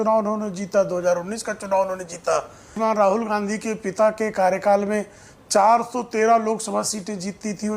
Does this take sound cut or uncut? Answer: cut